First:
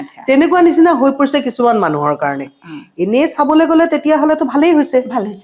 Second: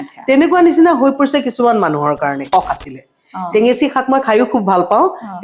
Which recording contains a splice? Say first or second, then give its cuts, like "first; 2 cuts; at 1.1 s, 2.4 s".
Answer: second; 1 cut; at 2.5 s